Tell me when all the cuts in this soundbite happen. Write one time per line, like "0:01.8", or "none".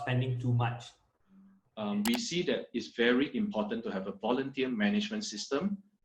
0:01.6